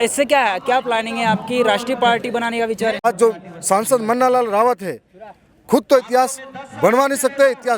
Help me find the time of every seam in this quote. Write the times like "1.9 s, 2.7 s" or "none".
3.0 s